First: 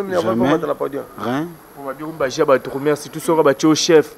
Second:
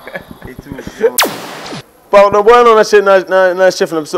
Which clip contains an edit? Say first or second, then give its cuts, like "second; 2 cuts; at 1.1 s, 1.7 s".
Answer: second; 1 cut; at 1.5 s